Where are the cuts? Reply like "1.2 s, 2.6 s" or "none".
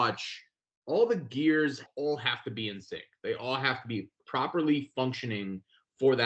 1.9 s, 4.2 s